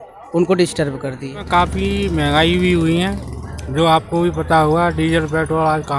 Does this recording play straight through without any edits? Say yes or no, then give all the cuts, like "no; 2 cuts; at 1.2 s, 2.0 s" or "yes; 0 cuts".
no; 1 cut; at 1.4 s